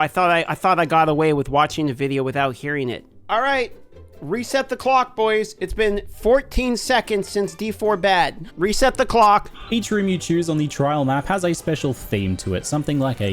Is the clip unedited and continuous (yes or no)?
no